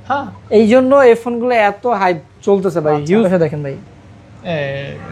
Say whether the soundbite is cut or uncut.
cut